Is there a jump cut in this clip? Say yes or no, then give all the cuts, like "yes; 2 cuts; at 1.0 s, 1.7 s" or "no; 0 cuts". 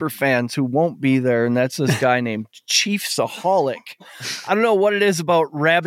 no; 0 cuts